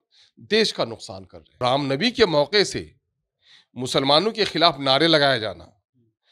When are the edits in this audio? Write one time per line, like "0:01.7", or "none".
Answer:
0:01.6